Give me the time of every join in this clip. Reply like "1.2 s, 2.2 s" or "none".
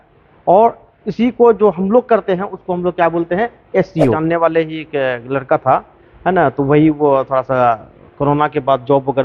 4.1 s